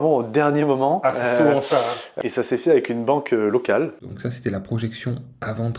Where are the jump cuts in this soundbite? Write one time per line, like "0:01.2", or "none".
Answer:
0:02.1
0:04.1